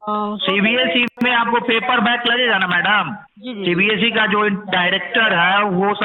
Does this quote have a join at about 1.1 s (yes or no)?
yes